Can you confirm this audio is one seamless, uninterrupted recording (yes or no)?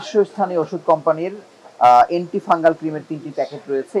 yes